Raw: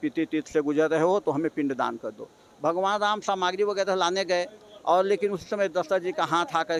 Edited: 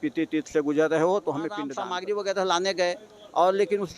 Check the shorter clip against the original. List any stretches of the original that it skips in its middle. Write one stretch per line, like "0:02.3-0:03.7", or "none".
0:01.8-0:03.3